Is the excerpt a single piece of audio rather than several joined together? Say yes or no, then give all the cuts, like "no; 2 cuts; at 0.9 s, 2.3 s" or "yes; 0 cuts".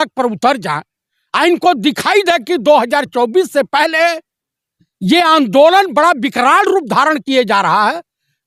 yes; 0 cuts